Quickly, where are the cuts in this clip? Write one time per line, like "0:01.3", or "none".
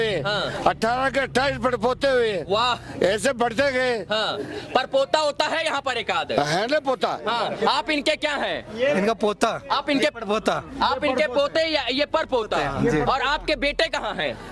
none